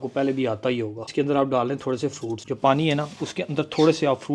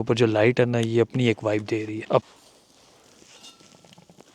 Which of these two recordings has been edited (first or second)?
second